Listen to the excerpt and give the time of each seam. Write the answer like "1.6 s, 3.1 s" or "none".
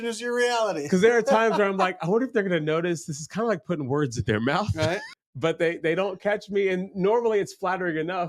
5.1 s